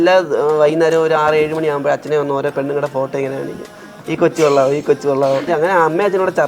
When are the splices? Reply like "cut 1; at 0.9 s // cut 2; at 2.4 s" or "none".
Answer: cut 1; at 5.4 s